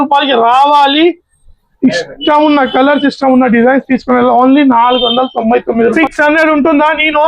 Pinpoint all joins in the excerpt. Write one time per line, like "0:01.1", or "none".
0:06.0